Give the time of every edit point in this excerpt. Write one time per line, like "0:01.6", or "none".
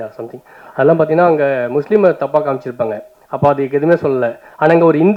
none